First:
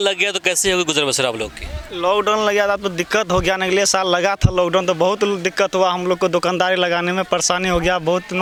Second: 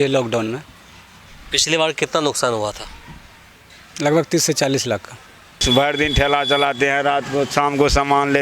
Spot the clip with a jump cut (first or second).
second